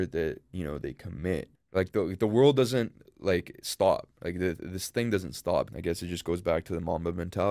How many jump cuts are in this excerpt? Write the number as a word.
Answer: two